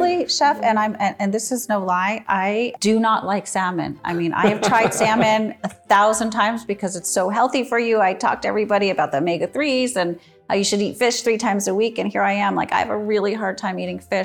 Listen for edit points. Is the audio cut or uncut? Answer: cut